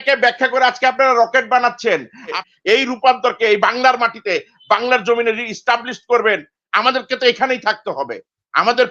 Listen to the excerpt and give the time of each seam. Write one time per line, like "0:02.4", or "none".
0:02.4